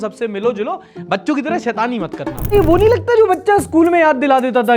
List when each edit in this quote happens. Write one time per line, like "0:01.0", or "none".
0:02.5